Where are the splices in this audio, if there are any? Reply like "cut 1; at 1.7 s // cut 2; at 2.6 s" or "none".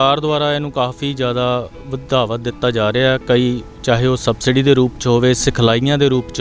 none